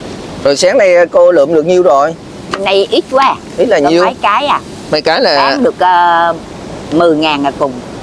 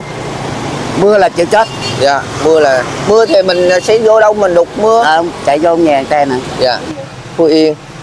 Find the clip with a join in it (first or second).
second